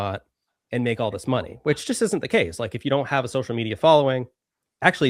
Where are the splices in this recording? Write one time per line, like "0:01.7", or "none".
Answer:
none

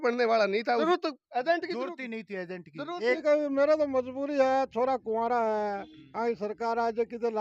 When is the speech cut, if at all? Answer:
0:00.8
0:03.2

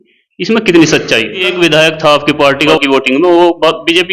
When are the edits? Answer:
0:01.5
0:02.8

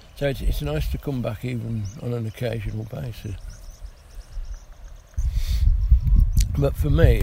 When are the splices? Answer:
0:05.2

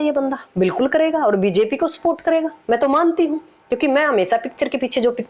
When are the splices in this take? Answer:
none

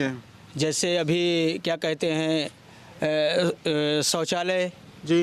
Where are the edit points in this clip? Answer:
none

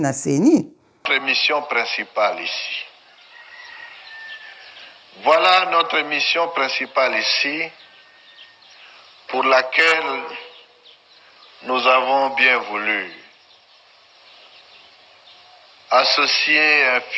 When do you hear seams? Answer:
0:01.1

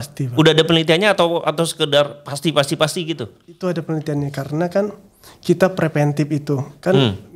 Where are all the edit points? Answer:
none

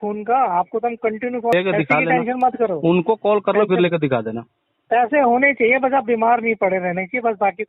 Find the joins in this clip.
0:01.5

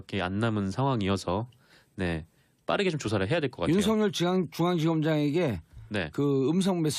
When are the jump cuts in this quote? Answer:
0:03.2

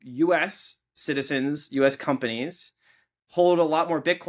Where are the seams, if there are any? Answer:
none

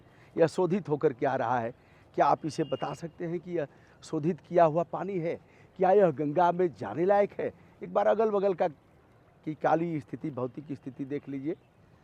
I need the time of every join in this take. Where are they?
none

